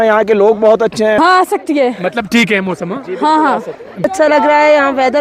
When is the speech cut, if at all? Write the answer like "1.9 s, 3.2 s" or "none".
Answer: 1.2 s, 4.1 s